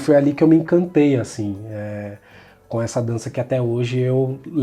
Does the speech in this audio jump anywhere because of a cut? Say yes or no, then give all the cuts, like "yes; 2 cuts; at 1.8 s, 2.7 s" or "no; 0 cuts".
no; 0 cuts